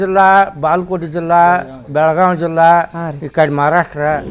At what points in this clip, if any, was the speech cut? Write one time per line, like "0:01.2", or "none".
none